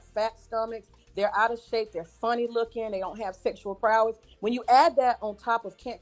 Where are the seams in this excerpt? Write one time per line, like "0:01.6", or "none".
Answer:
0:03.3
0:04.3